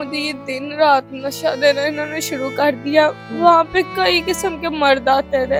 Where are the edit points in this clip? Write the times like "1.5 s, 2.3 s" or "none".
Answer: none